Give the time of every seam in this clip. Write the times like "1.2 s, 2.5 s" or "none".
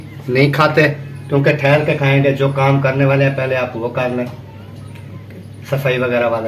none

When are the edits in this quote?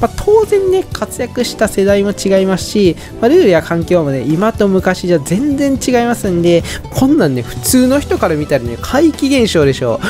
6.8 s

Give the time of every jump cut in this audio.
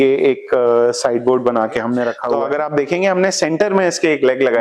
2.2 s

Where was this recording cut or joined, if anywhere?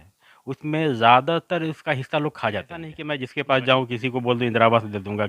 3.0 s

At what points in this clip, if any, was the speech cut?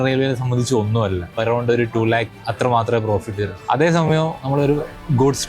1.4 s, 2.4 s, 3.5 s

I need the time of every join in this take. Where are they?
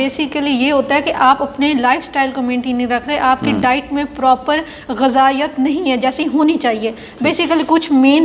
none

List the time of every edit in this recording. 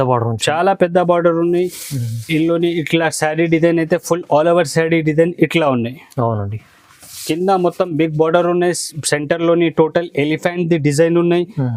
none

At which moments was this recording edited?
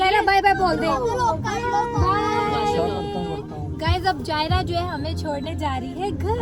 none

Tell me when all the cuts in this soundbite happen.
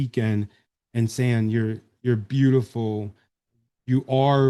none

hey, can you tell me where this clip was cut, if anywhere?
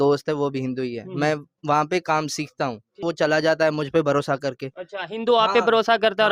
3.0 s

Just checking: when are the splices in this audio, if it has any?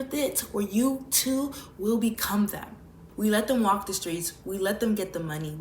3.0 s

